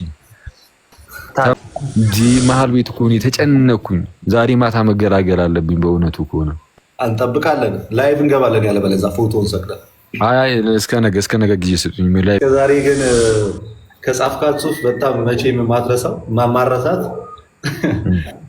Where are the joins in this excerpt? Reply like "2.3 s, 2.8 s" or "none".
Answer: 1.5 s, 12.4 s

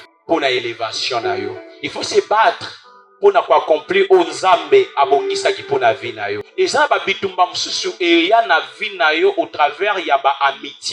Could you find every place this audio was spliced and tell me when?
6.4 s

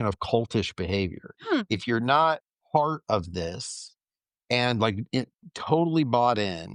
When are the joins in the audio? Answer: 1.3 s, 2.5 s

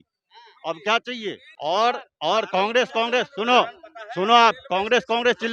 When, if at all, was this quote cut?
1.5 s

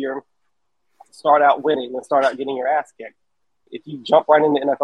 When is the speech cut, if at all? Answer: 3.6 s

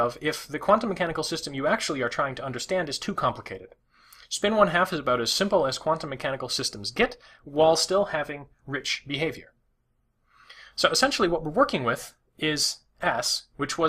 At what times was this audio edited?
7.8 s

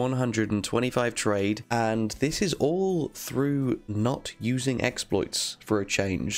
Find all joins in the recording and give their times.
1.6 s

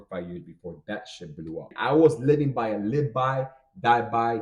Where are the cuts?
1.7 s

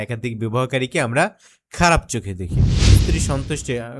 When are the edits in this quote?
2.9 s

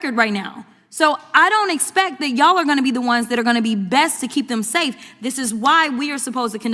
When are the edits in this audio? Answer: none

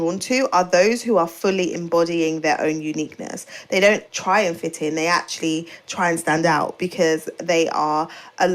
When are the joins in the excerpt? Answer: 4.1 s

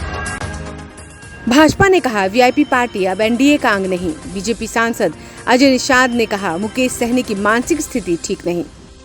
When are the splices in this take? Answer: 1.1 s

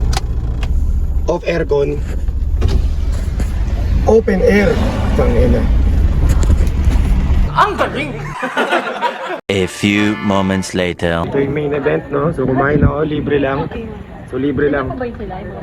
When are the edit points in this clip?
none

